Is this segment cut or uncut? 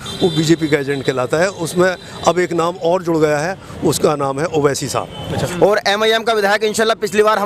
cut